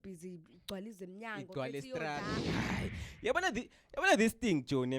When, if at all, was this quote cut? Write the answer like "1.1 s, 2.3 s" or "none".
2.6 s